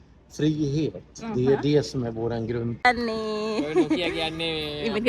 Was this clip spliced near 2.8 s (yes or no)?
yes